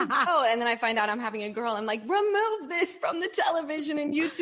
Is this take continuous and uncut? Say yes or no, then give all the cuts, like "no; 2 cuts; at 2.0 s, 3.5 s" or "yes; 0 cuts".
yes; 0 cuts